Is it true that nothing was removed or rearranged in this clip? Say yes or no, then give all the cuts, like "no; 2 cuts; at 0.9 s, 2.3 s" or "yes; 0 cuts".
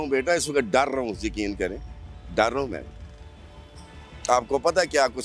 yes; 0 cuts